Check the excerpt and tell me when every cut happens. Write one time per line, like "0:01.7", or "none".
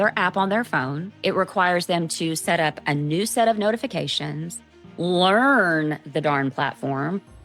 0:01.0